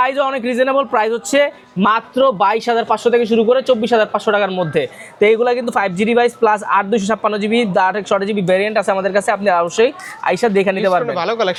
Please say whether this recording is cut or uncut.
uncut